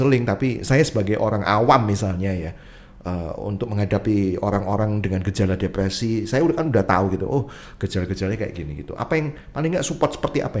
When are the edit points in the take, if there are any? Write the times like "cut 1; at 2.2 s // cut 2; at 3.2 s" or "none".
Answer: none

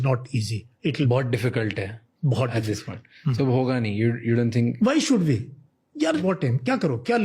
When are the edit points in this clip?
cut 1; at 1.1 s // cut 2; at 6.2 s

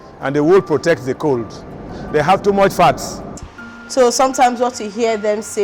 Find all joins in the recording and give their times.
cut 1; at 1.9 s // cut 2; at 3.4 s

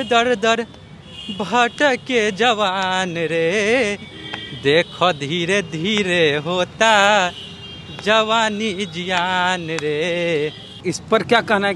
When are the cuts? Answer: cut 1; at 10.7 s

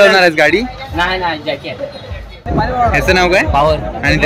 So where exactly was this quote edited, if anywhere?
cut 1; at 2.3 s

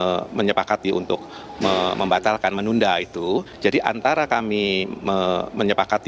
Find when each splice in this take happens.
none

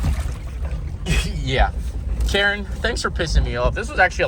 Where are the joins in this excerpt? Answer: none

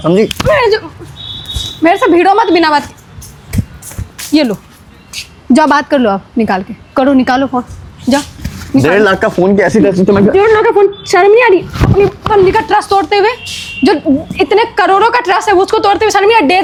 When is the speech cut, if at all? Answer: none

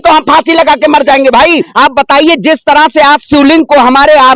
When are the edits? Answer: cut 1; at 1.7 s

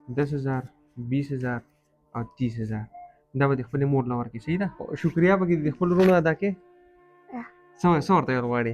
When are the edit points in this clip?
cut 1; at 4.9 s

